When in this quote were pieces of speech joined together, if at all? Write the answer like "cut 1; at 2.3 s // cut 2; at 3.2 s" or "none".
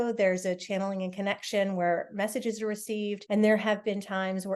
cut 1; at 3.2 s